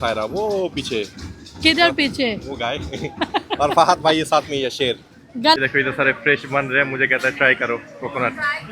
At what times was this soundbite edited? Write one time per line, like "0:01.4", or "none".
0:05.6